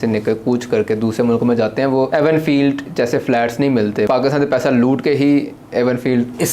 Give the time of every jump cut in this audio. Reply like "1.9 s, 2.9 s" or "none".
2.1 s, 4.1 s